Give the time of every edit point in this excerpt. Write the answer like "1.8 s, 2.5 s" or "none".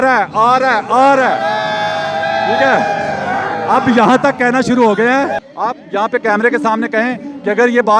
5.4 s